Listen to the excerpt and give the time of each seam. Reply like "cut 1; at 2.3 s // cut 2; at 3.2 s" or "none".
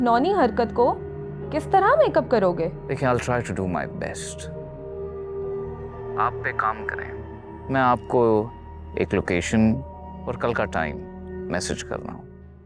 none